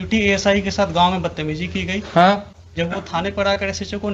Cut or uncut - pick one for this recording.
uncut